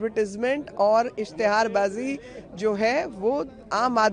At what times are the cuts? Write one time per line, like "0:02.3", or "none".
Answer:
none

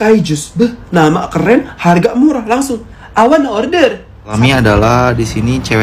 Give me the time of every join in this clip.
0:04.3

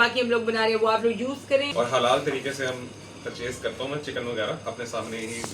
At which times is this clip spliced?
0:01.3

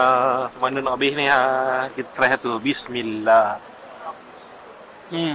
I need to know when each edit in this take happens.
0:01.9
0:03.7

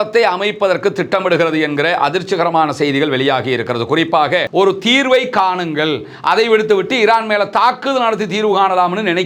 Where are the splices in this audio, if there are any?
0:04.5

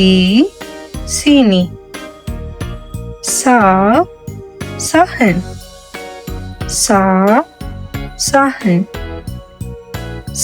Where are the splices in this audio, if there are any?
0:01.7
0:03.4

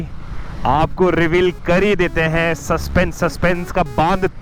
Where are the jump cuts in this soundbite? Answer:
none

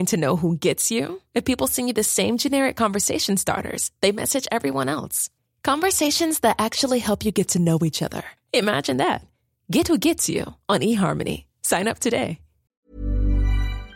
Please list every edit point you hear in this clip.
0:12.7

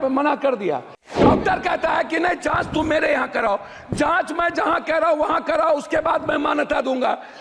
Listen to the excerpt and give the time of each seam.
0:01.2

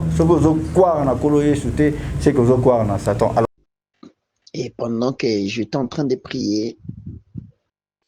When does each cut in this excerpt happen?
0:03.4

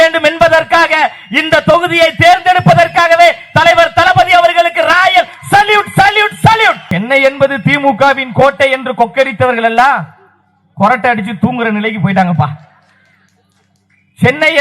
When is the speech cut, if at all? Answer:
0:06.8

